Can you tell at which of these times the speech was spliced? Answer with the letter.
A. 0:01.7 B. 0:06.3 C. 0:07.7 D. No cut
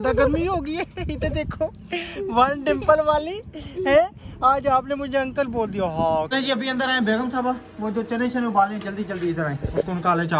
B